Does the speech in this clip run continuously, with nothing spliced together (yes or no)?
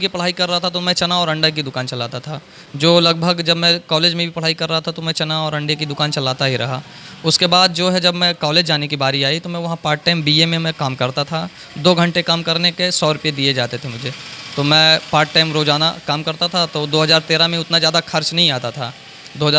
yes